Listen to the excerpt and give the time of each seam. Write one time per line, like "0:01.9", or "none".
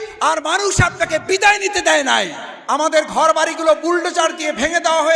0:02.5